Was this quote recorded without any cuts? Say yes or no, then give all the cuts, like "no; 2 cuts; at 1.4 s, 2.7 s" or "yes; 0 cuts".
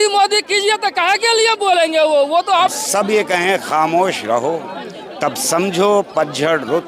no; 1 cut; at 2.7 s